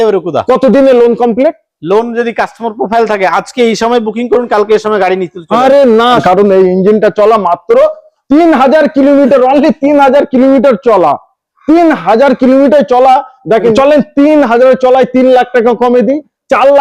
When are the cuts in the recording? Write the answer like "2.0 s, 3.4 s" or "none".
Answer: 6.2 s, 13.7 s